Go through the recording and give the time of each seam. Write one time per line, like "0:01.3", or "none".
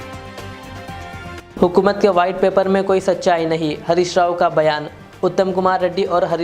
0:01.4